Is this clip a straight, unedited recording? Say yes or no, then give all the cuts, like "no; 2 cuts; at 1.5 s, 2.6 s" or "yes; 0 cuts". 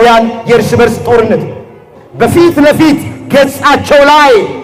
yes; 0 cuts